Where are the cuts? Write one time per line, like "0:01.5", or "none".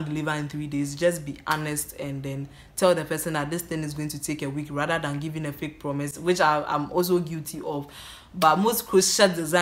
none